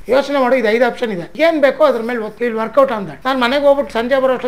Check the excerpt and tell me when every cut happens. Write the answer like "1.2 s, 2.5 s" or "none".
1.2 s, 2.3 s, 3.1 s